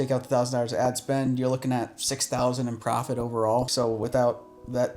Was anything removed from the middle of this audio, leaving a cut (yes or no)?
yes